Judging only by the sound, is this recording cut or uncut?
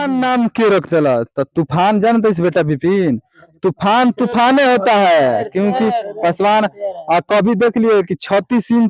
uncut